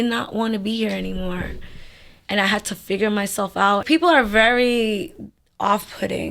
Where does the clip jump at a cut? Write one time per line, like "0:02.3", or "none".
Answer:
0:03.8